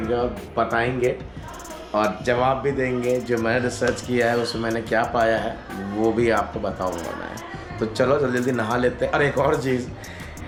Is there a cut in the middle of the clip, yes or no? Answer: no